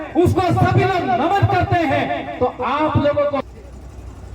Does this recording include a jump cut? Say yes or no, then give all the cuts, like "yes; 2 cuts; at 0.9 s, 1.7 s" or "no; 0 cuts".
yes; 1 cut; at 3.4 s